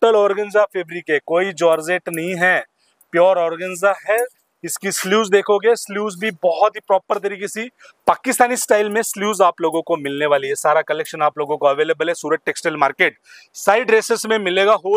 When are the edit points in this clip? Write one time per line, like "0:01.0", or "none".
none